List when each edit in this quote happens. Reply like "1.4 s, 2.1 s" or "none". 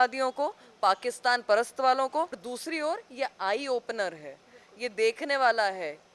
2.4 s